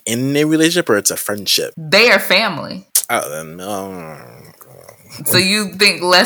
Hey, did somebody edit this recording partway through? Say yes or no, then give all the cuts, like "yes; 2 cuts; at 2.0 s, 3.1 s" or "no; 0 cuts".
yes; 2 cuts; at 1.8 s, 2.9 s